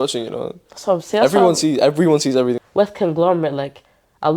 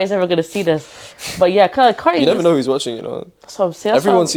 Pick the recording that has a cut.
first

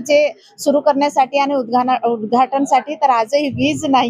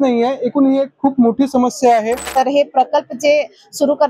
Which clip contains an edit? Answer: second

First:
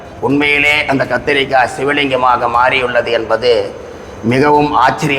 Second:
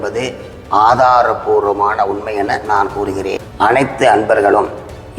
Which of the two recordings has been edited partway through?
second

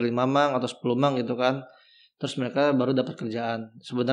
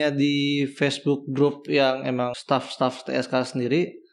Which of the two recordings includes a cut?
second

